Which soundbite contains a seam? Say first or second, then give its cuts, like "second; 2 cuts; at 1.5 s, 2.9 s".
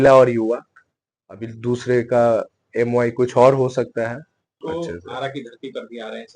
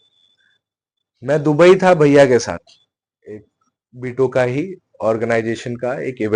first; 1 cut; at 4.6 s